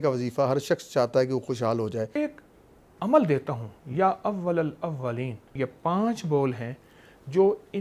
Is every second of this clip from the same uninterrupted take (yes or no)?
no